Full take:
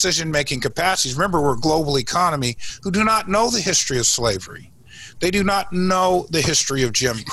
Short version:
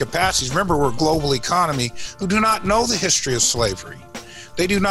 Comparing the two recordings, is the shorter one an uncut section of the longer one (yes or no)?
yes